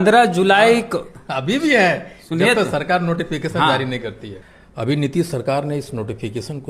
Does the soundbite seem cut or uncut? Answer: cut